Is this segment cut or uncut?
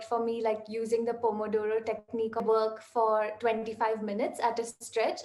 cut